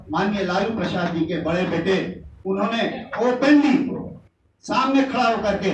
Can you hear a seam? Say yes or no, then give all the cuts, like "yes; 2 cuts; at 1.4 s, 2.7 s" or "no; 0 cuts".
no; 0 cuts